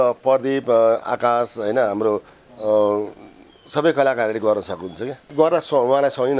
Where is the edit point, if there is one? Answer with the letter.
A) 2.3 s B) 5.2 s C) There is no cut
B